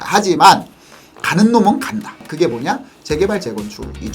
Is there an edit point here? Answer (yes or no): yes